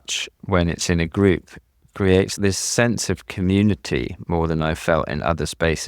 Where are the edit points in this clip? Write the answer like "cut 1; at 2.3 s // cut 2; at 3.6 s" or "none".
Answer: cut 1; at 2.4 s